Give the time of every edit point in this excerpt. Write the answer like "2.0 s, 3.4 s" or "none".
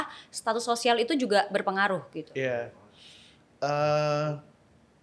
none

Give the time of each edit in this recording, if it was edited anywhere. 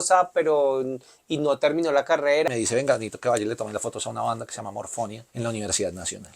2.5 s, 5.2 s

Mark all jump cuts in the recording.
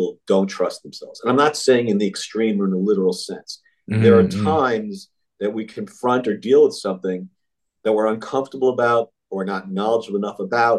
none

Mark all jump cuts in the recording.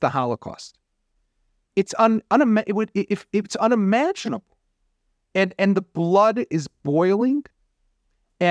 none

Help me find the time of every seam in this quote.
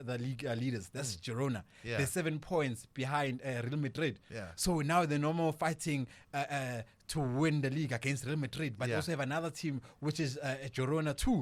none

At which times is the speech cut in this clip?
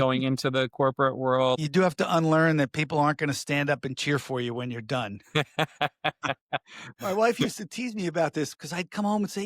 1.6 s, 7.0 s

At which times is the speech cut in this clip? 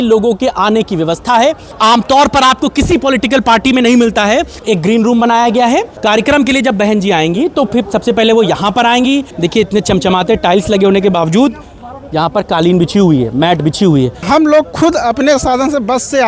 1.8 s, 4.5 s, 6.0 s, 9.3 s, 14.2 s

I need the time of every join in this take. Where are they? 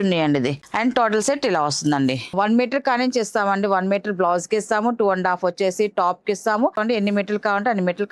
2.3 s, 6.8 s

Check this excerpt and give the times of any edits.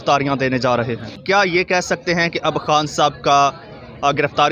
1.1 s

